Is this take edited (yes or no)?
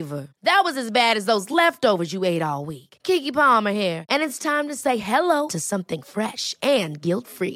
no